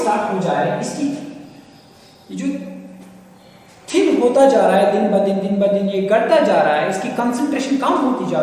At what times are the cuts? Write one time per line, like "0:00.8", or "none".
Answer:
none

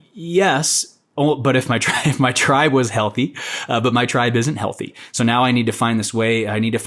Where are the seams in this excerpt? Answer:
none

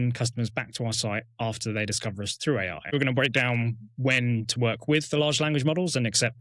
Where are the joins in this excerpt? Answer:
0:02.9

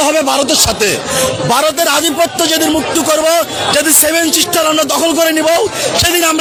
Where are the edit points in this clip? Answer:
none

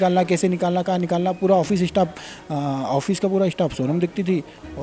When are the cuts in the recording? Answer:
none

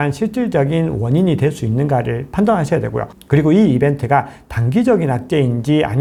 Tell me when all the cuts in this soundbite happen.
none

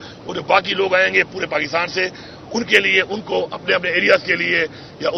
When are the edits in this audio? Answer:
none

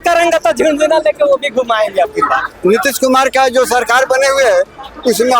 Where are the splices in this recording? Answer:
0:02.5

